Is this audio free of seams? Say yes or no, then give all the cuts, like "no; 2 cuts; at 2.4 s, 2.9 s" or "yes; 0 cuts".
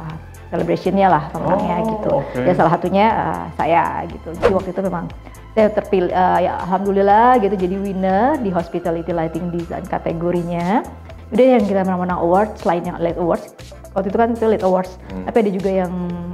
no; 1 cut; at 11.2 s